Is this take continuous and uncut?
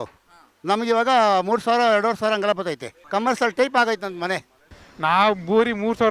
no; 2 cuts; at 2.9 s, 4.7 s

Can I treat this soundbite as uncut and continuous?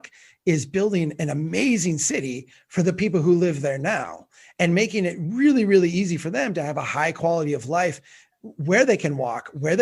yes; 0 cuts

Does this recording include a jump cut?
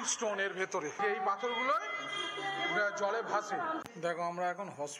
yes; 2 cuts; at 1.0 s, 3.8 s

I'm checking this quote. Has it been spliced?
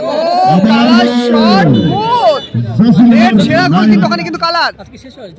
no; 0 cuts

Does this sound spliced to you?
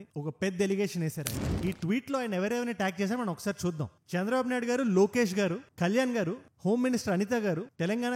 yes; 1 cut; at 1.5 s

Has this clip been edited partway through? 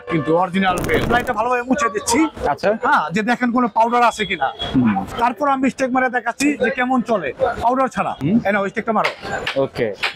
yes; 3 cuts; at 1.1 s, 5.1 s, 8.2 s

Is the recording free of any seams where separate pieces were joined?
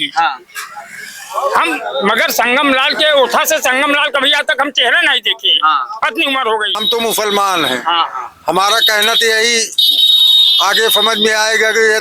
no; 1 cut; at 6.8 s

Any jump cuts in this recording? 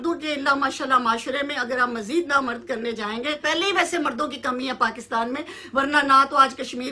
yes; 1 cut; at 3.4 s

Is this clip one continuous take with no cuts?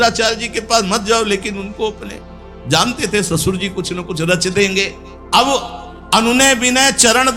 yes; 0 cuts

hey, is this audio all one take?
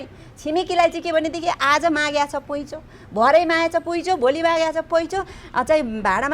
yes; 0 cuts

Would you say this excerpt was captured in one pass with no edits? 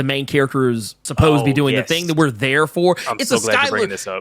no; 1 cut; at 1.0 s

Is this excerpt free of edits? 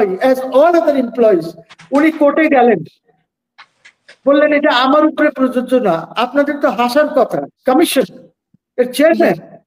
no; 1 cut; at 7.5 s

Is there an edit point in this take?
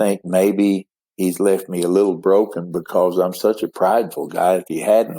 no; 0 cuts

